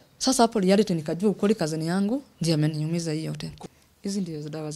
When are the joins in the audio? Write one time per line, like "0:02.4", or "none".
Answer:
0:03.5